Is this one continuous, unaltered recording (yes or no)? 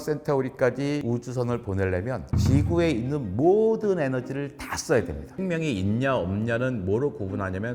no